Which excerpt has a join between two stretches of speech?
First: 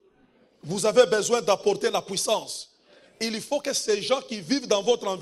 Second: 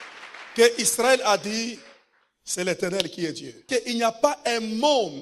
second; 1 cut; at 3.6 s

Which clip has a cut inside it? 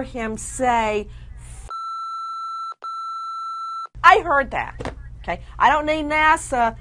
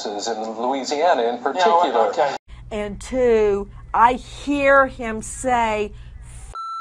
second; 1 cut; at 2.5 s

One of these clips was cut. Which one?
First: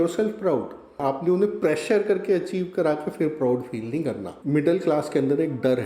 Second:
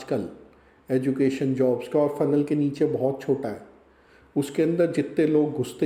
first; 2 cuts; at 0.9 s, 4.3 s

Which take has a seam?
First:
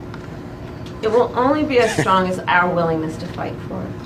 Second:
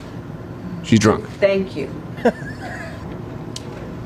second; 1 cut; at 3.1 s

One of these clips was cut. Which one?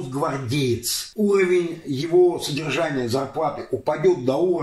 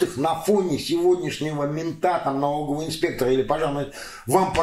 first; 1 cut; at 1.0 s

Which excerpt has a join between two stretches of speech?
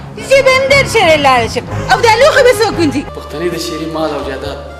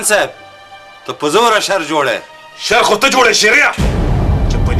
first; 1 cut; at 3.1 s

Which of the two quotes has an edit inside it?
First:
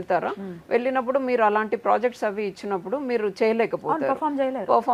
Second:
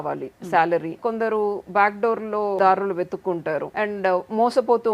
second; 3 cuts; at 1.0 s, 2.6 s, 3.7 s

